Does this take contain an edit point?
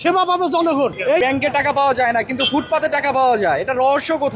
yes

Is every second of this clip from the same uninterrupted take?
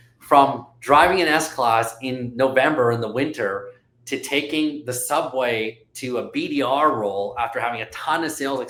yes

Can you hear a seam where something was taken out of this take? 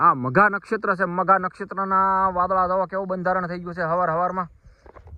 no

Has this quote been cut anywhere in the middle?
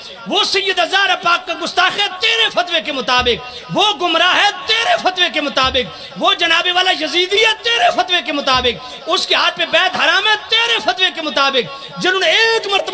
no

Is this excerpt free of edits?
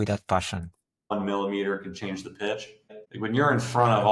no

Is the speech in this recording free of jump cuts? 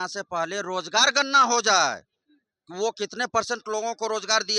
yes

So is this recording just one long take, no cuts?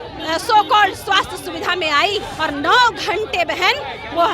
no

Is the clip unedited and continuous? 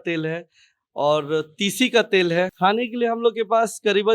no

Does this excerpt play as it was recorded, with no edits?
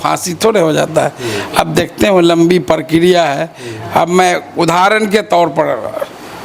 yes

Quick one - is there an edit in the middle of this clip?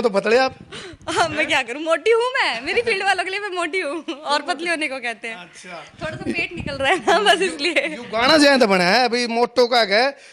no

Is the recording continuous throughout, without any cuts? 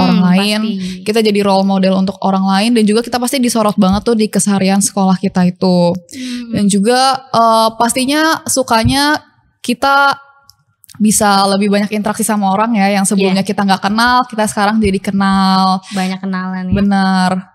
yes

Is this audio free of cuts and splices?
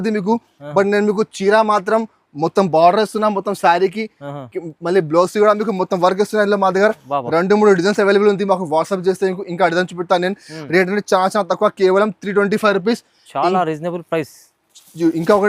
yes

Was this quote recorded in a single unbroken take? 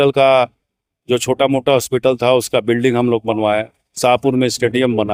yes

